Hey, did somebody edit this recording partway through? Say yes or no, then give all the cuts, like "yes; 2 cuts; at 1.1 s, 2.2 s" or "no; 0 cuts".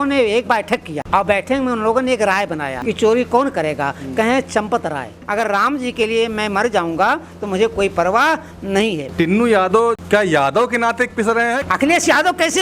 yes; 6 cuts; at 0.9 s, 2.7 s, 5.2 s, 9.0 s, 10.0 s, 11.6 s